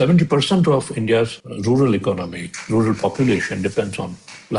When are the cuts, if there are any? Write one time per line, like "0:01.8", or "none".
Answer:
0:01.5